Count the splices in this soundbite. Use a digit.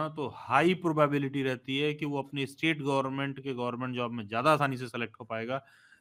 0